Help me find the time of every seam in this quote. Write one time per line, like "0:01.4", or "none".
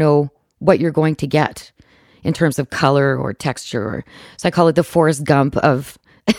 none